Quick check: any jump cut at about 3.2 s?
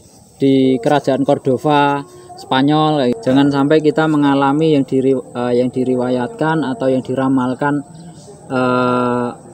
yes; 1 cut; at 3.2 s

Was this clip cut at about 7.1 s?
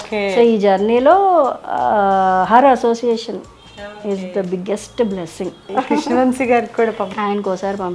yes; 2 cuts; at 5.6 s, 7.1 s

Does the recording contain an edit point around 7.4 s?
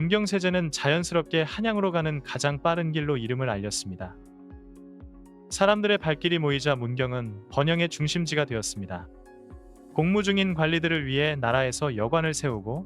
no; 2 cuts; at 4.1 s, 5.5 s

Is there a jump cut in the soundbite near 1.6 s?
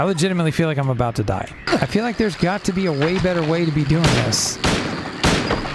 yes; 1 cut; at 1.6 s

